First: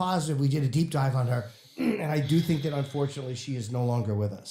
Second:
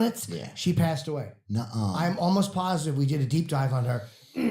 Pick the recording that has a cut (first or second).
second